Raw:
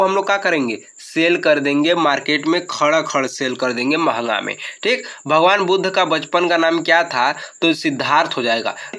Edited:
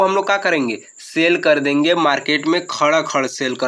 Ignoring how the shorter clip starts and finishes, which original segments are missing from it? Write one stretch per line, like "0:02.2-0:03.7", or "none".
none